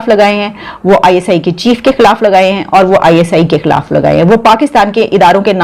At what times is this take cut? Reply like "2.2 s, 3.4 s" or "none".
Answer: none